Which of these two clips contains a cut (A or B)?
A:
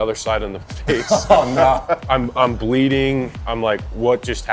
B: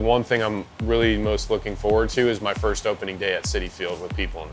A